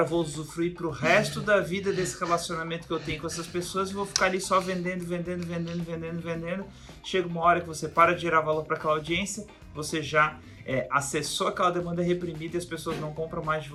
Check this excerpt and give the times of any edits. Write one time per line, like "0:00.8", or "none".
none